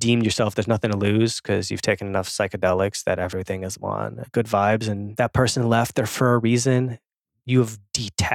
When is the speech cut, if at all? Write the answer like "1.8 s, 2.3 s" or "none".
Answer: 4.2 s, 5.1 s

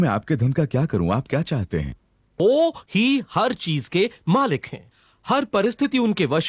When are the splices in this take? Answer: 2.3 s

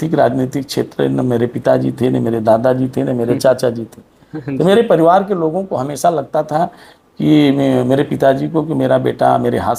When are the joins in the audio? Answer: none

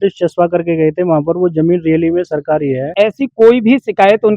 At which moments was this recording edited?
2.9 s

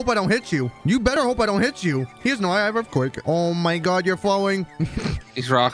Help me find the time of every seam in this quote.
1.1 s, 3.2 s

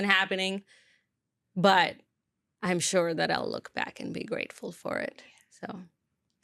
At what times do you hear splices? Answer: none

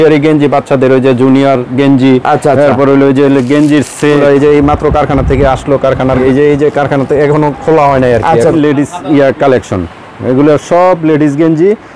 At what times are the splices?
4.2 s, 6.2 s, 8.5 s

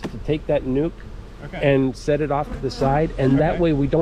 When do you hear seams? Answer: none

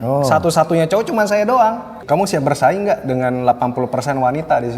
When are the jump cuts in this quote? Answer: 1.9 s

